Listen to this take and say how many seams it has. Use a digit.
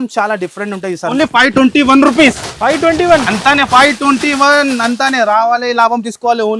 1